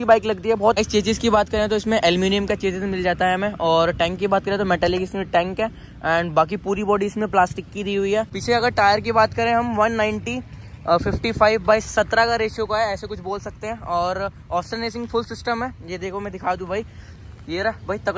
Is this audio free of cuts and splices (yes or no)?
no